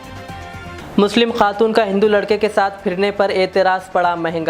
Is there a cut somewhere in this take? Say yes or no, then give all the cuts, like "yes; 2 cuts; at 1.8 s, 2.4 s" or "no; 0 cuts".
no; 0 cuts